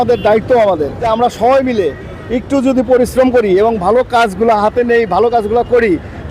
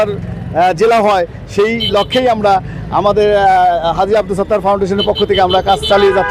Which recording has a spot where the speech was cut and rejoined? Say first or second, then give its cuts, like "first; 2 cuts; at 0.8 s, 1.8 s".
first; 1 cut; at 1.0 s